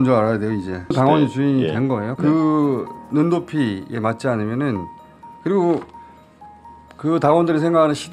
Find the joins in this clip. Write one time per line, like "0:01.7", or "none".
0:00.9
0:02.1

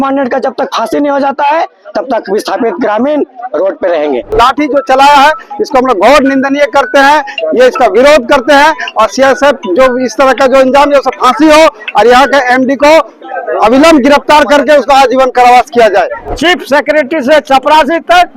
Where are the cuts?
0:04.3
0:16.2

